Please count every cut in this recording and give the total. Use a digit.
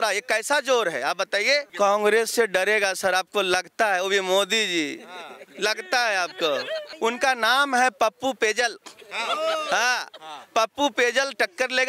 2